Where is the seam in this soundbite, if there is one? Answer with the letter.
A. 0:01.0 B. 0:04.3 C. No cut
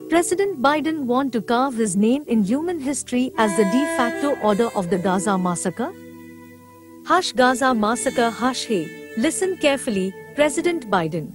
A